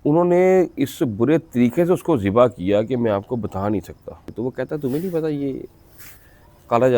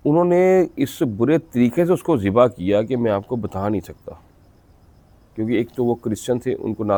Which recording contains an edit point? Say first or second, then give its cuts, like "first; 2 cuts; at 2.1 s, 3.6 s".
first; 1 cut; at 4.3 s